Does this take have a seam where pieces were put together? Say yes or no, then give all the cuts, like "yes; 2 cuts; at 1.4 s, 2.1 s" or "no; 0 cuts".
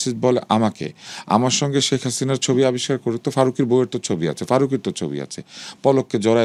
no; 0 cuts